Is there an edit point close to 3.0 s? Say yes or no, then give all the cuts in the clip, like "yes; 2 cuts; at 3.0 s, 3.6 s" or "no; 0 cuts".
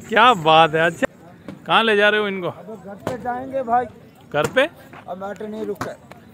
no; 1 cut; at 1.0 s